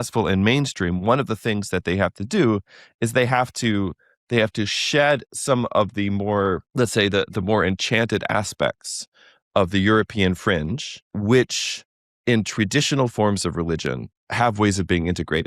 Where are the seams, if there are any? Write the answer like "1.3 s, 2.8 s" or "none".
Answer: 6.7 s, 11.1 s, 14.3 s